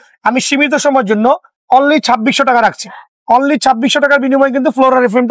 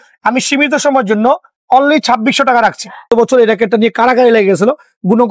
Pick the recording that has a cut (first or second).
second